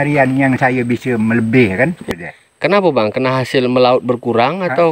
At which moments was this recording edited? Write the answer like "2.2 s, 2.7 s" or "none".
2.0 s